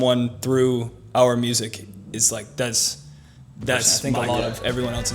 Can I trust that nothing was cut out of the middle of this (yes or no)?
no